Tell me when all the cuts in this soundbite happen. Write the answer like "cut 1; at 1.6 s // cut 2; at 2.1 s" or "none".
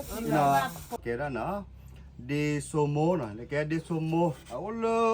cut 1; at 1.0 s